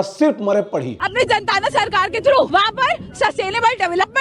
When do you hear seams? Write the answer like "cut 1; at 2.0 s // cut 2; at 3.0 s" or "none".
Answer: cut 1; at 1.0 s // cut 2; at 2.5 s